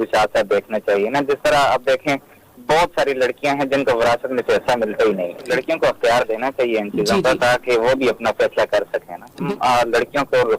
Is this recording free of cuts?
no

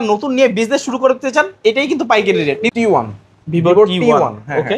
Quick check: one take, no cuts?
no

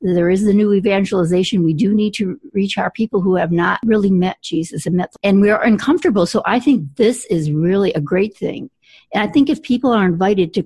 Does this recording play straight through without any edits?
no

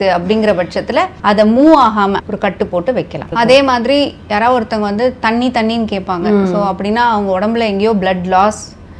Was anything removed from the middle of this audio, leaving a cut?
yes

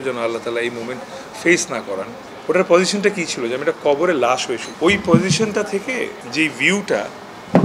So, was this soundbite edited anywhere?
yes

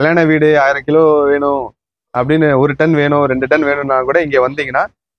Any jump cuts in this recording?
no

